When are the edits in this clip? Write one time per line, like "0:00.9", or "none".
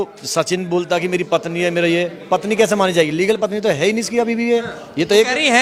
none